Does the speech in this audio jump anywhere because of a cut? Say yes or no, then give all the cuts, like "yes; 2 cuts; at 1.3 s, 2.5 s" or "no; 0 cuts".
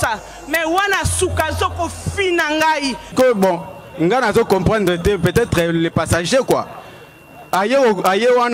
yes; 1 cut; at 3.1 s